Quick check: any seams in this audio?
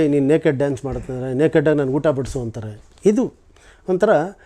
no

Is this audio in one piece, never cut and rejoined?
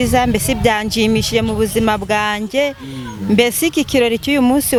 yes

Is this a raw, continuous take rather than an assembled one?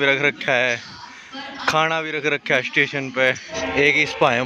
no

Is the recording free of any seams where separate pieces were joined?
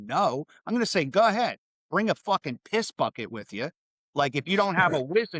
yes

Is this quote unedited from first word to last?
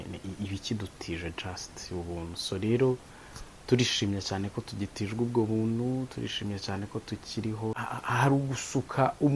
no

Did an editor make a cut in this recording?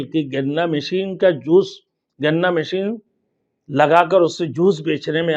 no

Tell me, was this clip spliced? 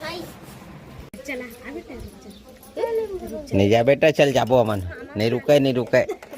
yes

